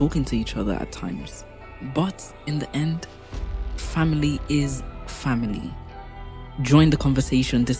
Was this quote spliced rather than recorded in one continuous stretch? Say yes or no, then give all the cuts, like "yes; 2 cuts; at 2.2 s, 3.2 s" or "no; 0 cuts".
no; 0 cuts